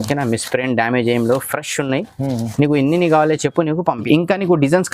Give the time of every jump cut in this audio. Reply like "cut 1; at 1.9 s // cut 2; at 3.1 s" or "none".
cut 1; at 4.0 s